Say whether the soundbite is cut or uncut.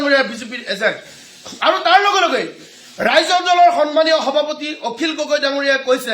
uncut